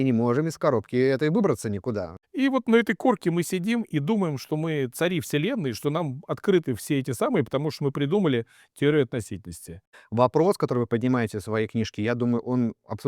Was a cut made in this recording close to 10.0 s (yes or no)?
yes